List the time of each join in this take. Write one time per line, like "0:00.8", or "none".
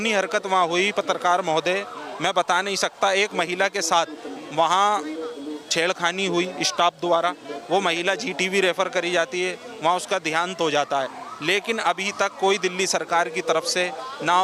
none